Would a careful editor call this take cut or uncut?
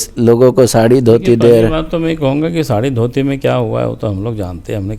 uncut